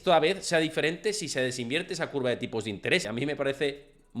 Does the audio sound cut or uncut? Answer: cut